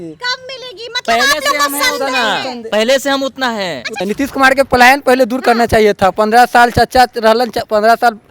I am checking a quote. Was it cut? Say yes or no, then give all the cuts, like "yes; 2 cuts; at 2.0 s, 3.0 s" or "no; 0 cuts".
yes; 1 cut; at 4.0 s